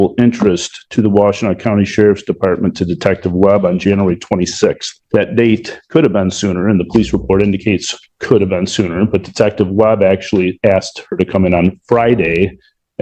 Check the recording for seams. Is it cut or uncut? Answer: uncut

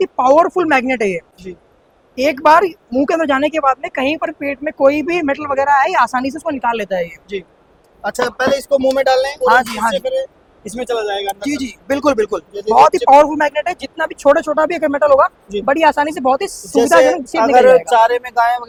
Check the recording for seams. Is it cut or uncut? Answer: uncut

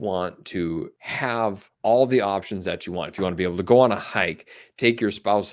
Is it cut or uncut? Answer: cut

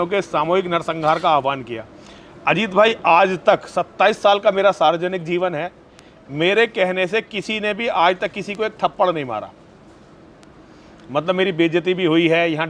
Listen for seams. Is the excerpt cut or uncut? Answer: uncut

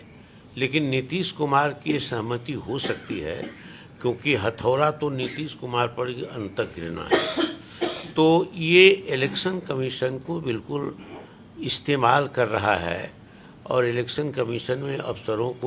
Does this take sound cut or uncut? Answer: uncut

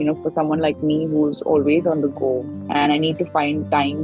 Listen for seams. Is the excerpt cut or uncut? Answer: uncut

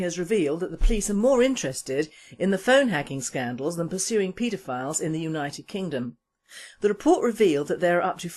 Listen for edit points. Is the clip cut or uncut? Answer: uncut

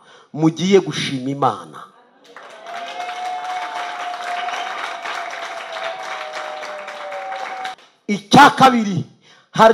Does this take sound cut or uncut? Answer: cut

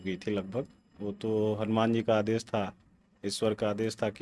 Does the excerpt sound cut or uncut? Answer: uncut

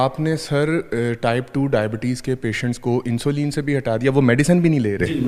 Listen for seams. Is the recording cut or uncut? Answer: uncut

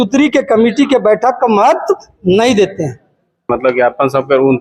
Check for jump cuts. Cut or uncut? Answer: cut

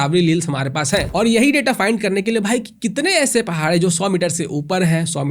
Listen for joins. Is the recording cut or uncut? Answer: cut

